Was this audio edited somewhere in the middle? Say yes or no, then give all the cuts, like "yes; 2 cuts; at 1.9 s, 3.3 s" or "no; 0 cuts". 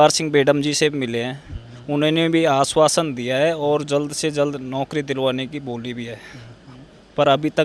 no; 0 cuts